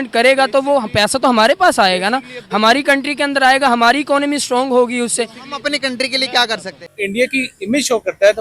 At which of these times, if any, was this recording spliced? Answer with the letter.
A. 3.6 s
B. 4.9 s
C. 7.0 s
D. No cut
C